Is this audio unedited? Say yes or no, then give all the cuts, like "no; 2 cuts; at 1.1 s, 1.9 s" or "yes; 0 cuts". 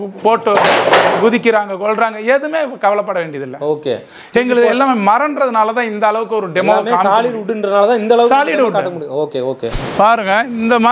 yes; 0 cuts